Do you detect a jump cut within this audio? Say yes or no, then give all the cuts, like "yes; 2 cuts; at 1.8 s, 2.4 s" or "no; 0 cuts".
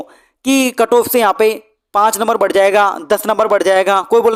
no; 0 cuts